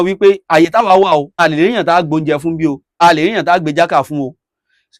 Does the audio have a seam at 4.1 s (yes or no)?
no